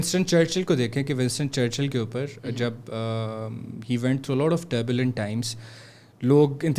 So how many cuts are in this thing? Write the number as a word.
zero